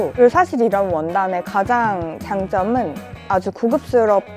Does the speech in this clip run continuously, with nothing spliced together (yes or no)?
yes